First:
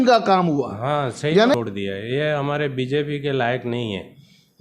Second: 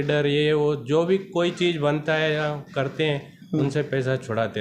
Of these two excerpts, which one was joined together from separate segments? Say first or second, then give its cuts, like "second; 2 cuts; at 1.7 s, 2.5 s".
first; 1 cut; at 1.5 s